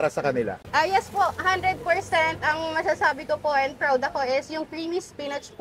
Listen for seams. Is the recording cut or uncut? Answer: uncut